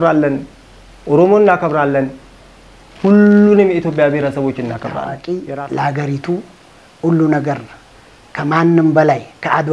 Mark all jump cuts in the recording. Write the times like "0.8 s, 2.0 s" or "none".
5.1 s